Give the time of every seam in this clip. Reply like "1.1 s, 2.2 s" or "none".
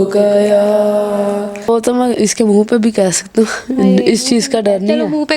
1.7 s